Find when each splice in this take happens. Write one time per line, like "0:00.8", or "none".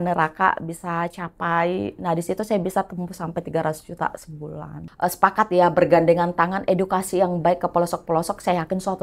0:04.8

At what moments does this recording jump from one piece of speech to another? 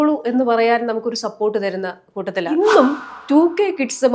0:02.5

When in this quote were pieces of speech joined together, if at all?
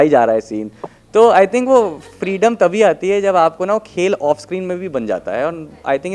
none

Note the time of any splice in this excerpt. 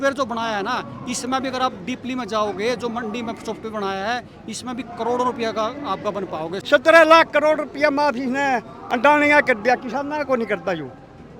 0:06.5

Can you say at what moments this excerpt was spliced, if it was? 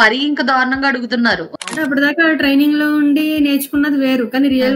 0:01.5

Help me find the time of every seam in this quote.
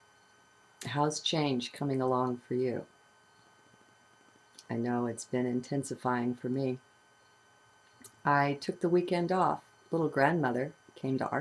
0:04.8

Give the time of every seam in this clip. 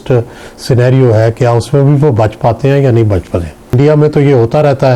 0:03.7

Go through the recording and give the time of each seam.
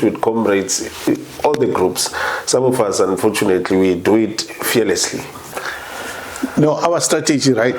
0:05.5

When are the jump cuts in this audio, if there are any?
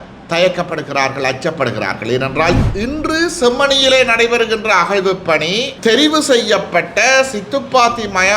0:02.6
0:05.7

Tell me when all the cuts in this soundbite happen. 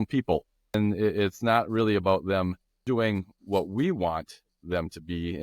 0:00.8
0:02.7

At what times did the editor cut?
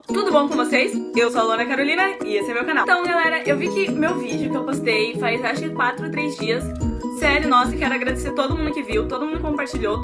none

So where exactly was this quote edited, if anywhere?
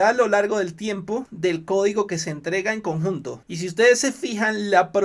0:01.3
0:03.4

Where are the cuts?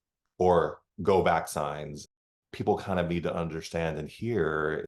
none

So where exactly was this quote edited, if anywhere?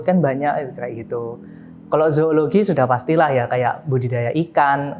none

